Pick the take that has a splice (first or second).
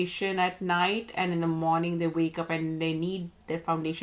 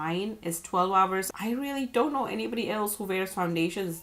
second